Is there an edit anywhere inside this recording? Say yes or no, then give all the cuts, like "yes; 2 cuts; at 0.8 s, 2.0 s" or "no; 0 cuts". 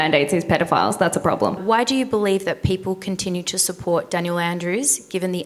yes; 1 cut; at 1.6 s